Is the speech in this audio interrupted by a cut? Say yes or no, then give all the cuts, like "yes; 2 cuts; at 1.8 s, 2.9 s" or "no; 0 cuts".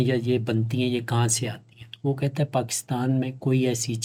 no; 0 cuts